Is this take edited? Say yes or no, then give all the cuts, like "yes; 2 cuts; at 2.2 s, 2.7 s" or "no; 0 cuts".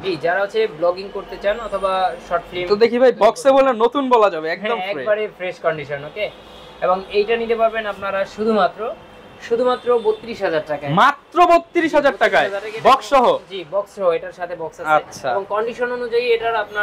no; 0 cuts